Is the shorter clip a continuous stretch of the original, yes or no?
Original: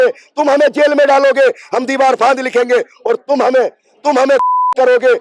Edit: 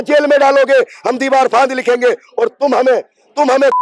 yes